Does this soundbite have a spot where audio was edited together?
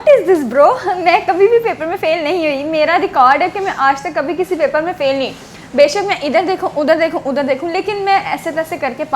no; 0 cuts

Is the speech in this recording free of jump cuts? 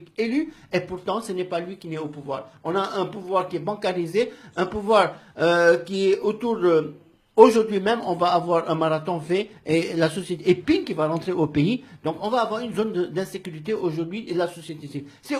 yes; 0 cuts

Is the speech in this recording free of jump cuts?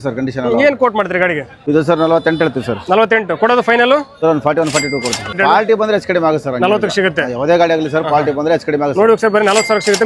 no; 3 cuts; at 1.5 s, 4.1 s, 5.3 s

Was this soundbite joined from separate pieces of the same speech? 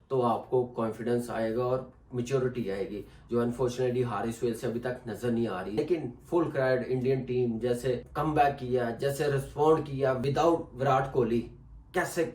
yes; 3 cuts; at 5.8 s, 8.1 s, 10.2 s

